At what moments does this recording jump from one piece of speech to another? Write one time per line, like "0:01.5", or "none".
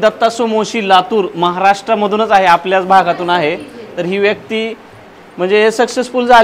none